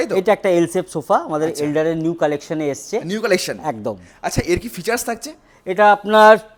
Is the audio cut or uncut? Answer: uncut